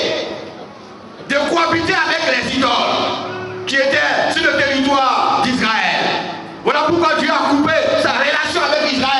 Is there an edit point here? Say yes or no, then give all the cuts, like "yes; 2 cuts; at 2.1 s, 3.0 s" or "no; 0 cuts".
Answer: no; 0 cuts